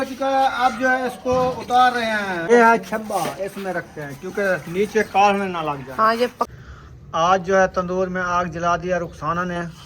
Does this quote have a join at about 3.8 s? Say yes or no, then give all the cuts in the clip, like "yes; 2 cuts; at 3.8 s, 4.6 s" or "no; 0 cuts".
no; 2 cuts; at 2.5 s, 6.5 s